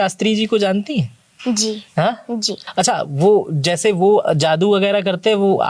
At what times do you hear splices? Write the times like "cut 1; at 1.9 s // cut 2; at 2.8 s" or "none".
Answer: cut 1; at 2.6 s